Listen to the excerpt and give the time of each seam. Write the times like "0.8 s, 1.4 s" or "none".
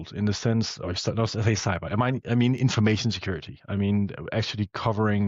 none